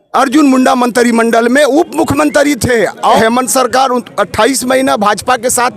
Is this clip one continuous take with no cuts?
no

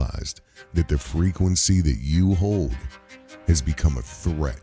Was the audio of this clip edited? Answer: no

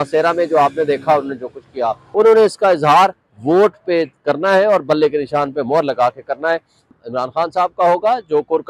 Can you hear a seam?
yes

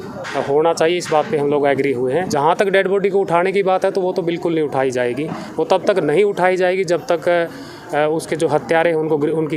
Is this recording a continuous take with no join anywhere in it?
no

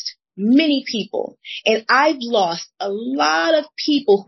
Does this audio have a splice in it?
no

